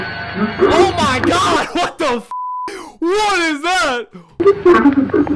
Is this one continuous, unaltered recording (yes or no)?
yes